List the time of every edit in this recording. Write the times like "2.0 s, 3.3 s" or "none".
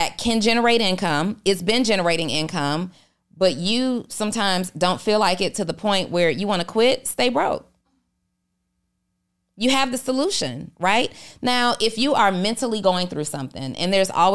none